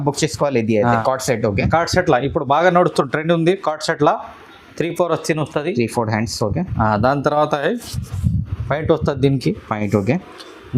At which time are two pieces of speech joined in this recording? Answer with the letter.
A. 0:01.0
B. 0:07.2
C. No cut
A